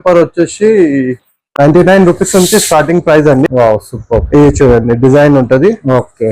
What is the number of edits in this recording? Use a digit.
1